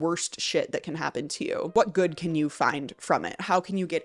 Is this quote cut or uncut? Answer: cut